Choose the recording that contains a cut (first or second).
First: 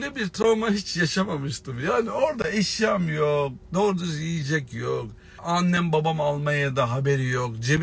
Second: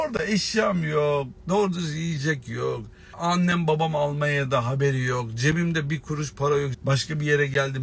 second